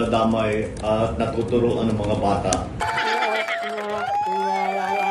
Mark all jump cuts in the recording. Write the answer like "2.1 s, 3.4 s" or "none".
2.8 s